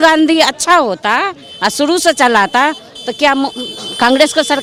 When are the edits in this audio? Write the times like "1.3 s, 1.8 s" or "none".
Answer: none